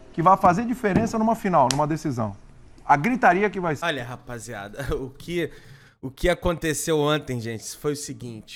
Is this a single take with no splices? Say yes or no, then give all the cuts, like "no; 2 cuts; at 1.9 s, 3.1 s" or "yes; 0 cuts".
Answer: yes; 0 cuts